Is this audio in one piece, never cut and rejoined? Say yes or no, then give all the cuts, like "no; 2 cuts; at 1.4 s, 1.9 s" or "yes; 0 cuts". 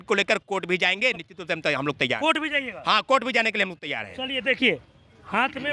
yes; 0 cuts